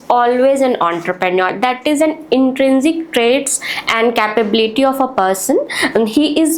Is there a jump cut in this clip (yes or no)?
no